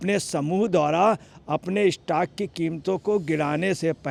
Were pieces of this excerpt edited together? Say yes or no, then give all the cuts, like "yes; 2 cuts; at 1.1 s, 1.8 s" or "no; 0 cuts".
no; 0 cuts